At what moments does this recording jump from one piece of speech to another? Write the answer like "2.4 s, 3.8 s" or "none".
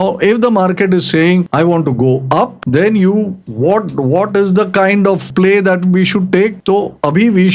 1.5 s, 2.6 s, 3.4 s, 5.2 s, 6.6 s